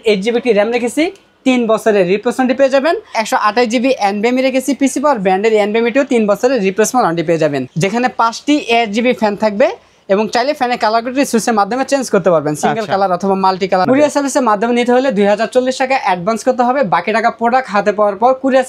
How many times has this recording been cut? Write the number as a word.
three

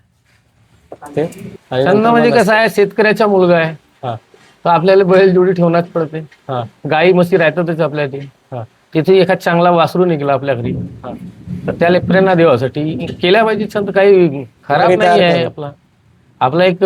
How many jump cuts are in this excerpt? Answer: one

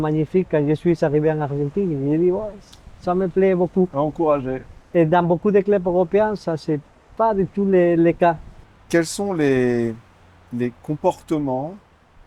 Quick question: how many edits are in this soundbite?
one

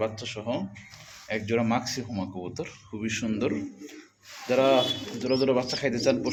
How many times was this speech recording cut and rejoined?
zero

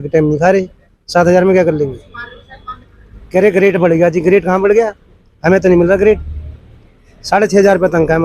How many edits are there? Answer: zero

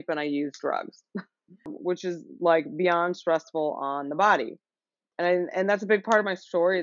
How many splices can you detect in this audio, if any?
two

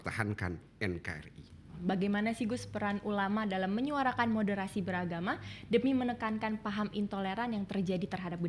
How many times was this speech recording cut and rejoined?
one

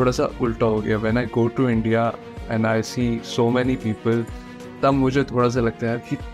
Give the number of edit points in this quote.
zero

